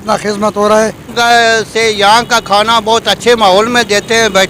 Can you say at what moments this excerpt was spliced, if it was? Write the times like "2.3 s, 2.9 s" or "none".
1.1 s